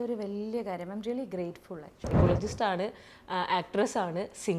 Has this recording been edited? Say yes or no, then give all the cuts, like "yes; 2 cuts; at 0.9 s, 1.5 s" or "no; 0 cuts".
yes; 1 cut; at 2.1 s